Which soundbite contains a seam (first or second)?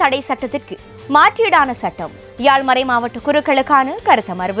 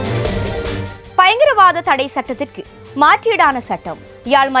second